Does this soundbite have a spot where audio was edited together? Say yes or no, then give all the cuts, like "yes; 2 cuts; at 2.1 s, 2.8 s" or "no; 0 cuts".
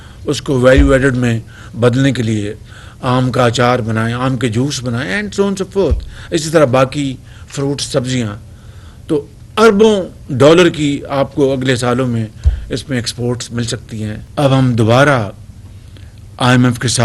yes; 1 cut; at 14.2 s